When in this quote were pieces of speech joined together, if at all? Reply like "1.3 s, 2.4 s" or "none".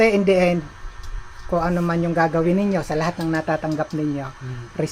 none